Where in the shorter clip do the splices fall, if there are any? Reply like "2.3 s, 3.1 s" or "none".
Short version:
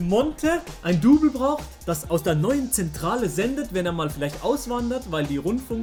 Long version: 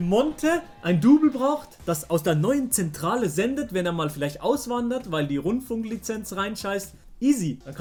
none